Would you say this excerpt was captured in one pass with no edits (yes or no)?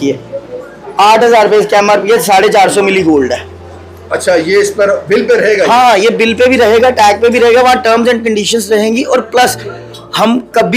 yes